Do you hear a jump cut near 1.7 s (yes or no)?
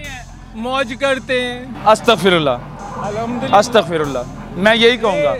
yes